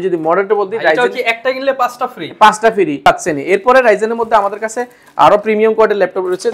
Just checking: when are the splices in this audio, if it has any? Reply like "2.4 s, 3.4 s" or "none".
3.1 s